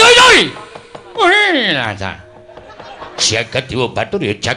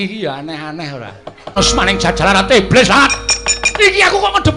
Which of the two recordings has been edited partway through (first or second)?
second